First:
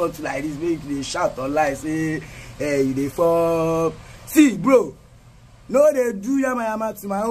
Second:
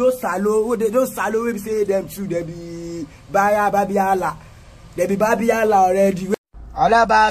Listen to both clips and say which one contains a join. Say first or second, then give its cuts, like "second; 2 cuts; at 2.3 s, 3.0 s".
second; 1 cut; at 6.3 s